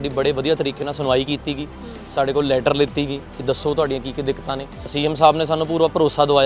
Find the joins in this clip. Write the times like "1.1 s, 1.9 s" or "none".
4.9 s